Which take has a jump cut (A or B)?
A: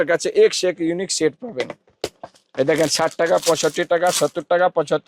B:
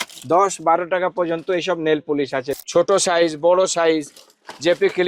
B